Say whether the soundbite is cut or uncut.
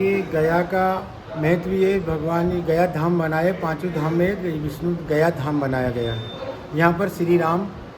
uncut